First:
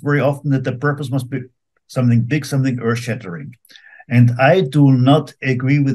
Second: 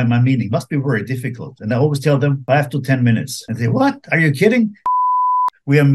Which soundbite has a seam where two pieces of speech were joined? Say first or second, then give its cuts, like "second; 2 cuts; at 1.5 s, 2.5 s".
second; 3 cuts; at 2.4 s, 3.4 s, 5.1 s